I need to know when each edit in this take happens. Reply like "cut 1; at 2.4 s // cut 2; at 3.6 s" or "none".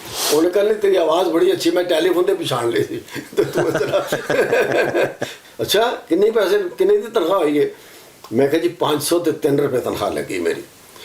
cut 1; at 5.4 s